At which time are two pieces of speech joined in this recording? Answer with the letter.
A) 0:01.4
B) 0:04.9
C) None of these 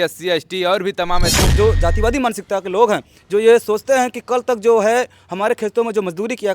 A